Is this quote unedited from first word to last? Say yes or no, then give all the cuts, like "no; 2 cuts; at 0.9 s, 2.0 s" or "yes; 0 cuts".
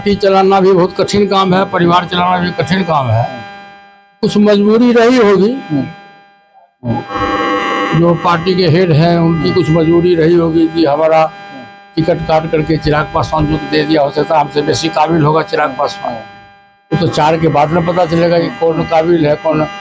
yes; 0 cuts